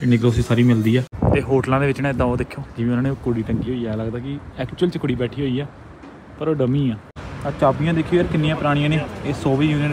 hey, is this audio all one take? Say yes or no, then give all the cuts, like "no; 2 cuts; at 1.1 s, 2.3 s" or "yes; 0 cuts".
no; 2 cuts; at 1.1 s, 7.2 s